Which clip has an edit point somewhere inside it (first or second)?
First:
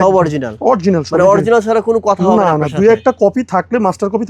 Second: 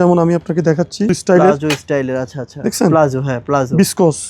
second